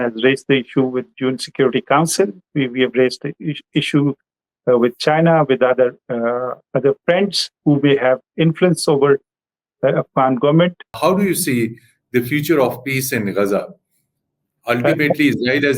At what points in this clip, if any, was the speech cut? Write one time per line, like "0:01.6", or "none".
0:11.0